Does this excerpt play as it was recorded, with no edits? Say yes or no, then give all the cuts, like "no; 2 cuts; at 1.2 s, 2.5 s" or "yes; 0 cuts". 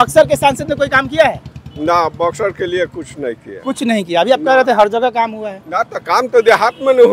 yes; 0 cuts